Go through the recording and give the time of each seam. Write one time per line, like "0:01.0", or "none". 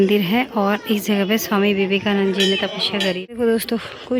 0:03.2